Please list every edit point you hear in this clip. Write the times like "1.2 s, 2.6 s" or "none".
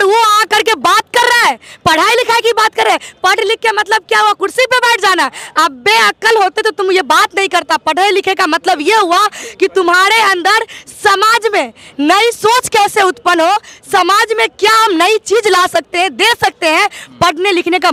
none